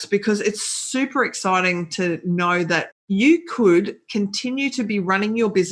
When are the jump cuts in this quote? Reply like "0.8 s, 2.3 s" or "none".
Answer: 2.9 s